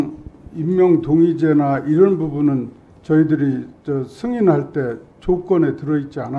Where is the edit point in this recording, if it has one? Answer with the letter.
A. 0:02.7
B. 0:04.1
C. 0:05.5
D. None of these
D